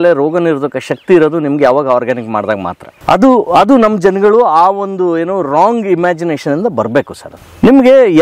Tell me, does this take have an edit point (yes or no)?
no